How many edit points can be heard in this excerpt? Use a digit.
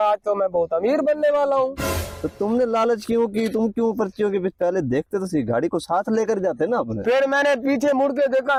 0